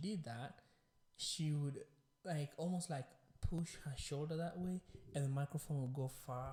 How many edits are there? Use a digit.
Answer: 0